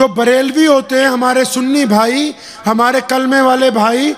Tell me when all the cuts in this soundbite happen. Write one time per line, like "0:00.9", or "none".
none